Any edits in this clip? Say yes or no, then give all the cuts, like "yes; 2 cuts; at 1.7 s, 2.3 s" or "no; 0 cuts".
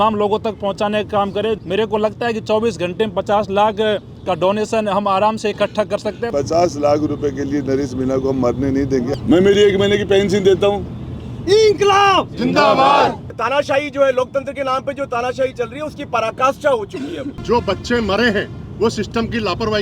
yes; 5 cuts; at 1.6 s, 6.3 s, 9.2 s, 13.3 s, 17.3 s